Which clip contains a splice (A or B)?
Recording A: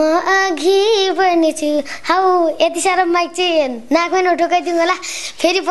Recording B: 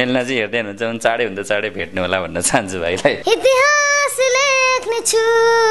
B